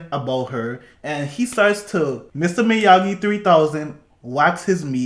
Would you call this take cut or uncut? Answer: cut